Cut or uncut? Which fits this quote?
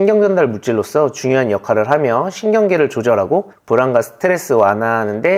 uncut